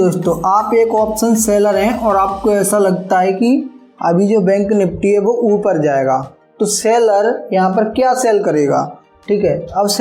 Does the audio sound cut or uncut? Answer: uncut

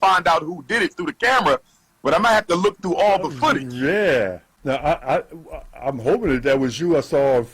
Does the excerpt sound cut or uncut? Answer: cut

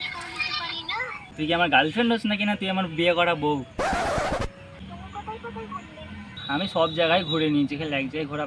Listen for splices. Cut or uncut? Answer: cut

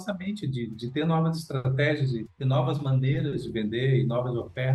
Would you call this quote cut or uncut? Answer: uncut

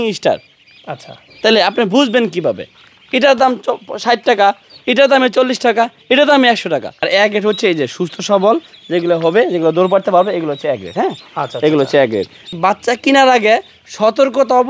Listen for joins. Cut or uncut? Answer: cut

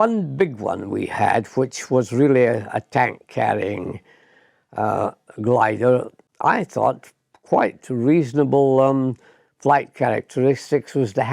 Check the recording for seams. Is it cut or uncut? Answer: cut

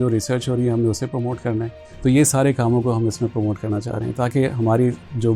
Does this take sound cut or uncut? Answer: cut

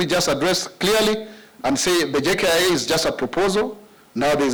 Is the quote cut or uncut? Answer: uncut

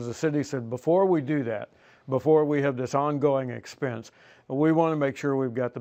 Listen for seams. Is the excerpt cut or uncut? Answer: uncut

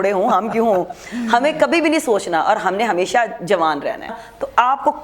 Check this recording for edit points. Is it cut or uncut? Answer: cut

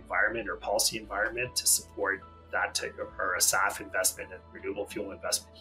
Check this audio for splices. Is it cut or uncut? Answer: uncut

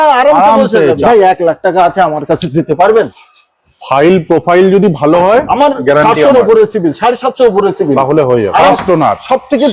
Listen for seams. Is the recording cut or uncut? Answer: cut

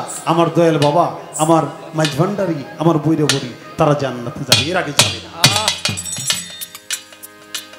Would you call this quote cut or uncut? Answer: uncut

